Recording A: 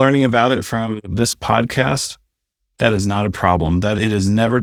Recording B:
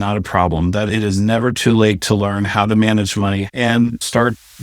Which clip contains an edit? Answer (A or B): B